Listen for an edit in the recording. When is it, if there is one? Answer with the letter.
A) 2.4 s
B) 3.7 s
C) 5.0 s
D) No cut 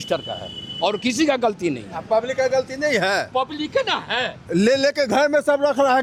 D